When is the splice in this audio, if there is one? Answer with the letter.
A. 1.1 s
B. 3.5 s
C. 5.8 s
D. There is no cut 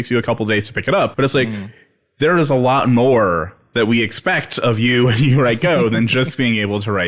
A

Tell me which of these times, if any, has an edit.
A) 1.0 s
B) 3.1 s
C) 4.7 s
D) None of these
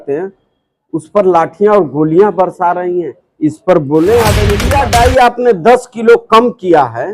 C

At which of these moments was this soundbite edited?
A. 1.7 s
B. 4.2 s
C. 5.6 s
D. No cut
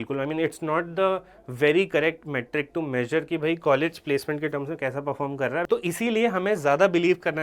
C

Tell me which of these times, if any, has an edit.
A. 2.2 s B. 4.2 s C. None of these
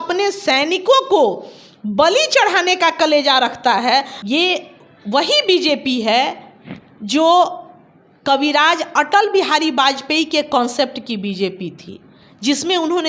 B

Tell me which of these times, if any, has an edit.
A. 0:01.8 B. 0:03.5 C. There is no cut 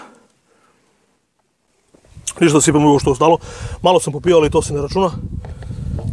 A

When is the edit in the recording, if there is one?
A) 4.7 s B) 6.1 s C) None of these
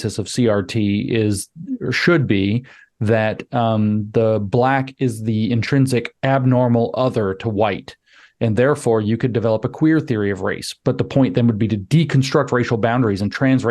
B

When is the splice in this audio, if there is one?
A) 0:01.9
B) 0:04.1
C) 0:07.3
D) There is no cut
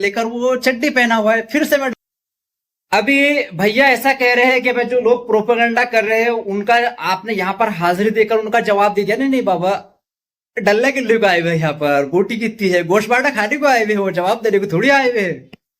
A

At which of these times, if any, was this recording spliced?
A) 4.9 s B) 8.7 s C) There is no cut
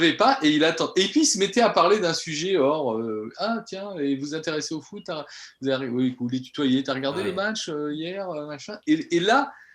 C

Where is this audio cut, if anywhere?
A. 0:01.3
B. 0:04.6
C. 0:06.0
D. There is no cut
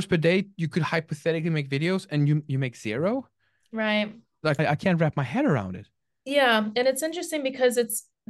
B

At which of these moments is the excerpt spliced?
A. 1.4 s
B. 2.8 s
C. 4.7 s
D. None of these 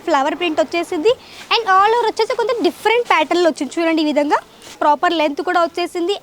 C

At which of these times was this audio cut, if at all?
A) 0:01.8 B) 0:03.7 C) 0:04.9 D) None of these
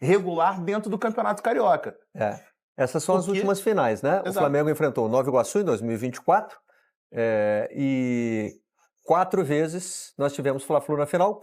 D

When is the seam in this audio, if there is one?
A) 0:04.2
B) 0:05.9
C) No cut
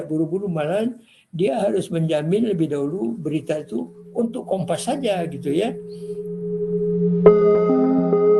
B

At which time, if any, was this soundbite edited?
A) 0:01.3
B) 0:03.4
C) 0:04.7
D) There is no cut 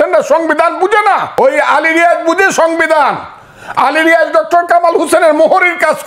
A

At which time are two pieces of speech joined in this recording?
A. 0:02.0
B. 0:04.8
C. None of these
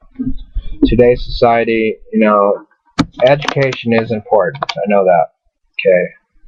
B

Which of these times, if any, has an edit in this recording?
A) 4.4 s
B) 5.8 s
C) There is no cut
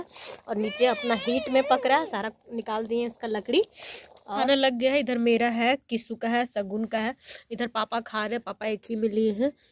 A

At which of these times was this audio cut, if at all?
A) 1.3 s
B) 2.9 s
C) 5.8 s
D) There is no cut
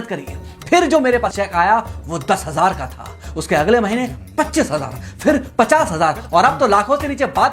A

